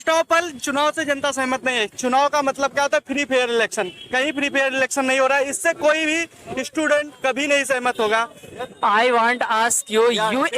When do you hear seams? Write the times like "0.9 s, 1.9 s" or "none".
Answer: 8.6 s